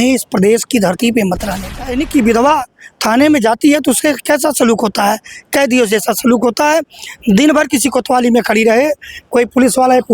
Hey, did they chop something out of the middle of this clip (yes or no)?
yes